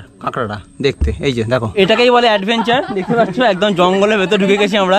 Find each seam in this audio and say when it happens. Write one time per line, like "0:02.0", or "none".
0:01.7